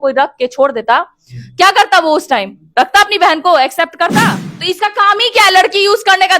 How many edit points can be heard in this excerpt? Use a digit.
1